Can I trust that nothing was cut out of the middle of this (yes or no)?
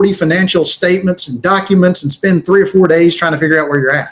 yes